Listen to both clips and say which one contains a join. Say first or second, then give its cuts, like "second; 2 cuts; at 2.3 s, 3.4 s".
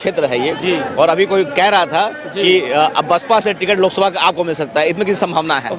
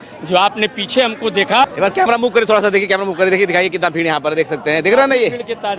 second; 1 cut; at 1.6 s